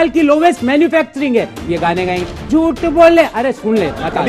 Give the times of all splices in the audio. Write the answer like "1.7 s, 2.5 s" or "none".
none